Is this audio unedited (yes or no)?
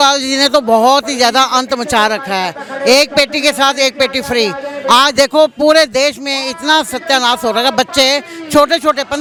yes